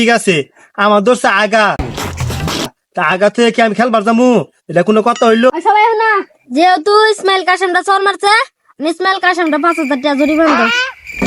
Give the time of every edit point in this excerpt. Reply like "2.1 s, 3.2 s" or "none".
5.5 s